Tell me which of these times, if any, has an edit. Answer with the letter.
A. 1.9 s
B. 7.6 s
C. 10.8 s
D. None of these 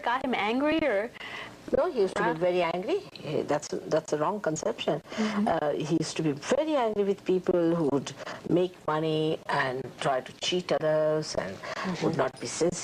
D